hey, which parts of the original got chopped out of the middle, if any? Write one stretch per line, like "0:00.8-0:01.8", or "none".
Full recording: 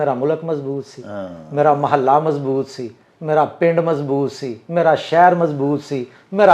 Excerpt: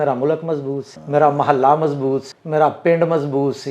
0:00.9-0:01.4
0:02.8-0:03.1